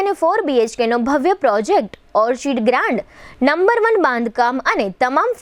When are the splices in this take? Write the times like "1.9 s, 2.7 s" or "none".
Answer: none